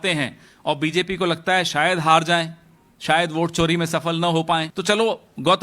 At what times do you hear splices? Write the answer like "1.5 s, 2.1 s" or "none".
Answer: 4.7 s